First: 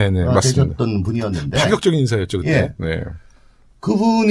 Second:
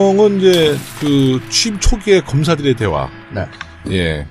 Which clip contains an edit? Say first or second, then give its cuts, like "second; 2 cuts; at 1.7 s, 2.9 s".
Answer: first; 1 cut; at 3.1 s